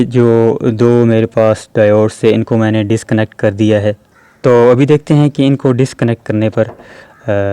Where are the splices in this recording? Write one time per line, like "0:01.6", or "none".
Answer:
0:04.1

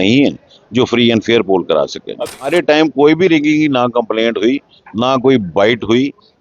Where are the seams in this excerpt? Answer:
0:02.5

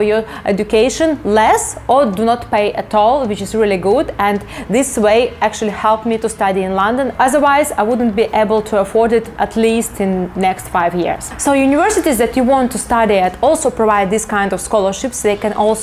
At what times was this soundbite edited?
none

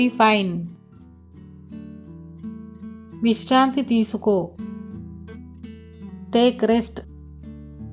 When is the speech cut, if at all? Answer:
none

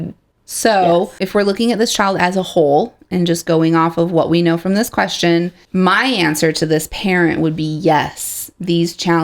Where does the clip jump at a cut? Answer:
0:01.2
0:05.6

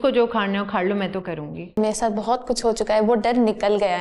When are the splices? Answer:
0:01.8

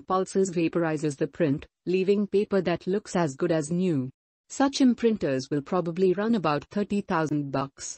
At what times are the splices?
0:03.5

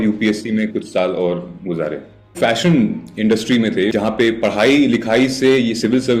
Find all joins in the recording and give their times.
0:02.4
0:03.9

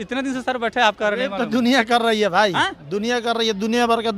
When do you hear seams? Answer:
none

